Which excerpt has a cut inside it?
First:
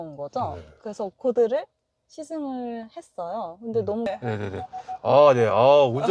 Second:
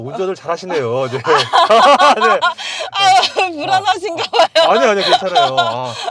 first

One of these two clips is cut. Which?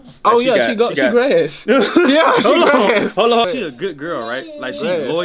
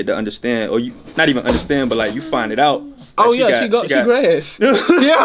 first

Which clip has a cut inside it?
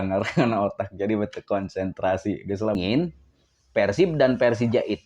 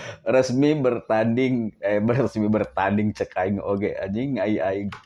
first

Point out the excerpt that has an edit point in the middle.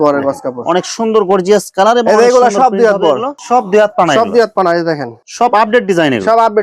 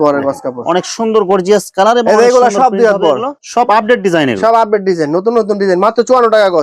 second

